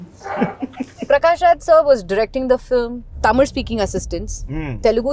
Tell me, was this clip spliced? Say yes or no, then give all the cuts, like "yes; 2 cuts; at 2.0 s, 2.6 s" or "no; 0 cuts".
yes; 2 cuts; at 1.0 s, 3.0 s